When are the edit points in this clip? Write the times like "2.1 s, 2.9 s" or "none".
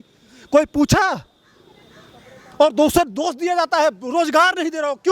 none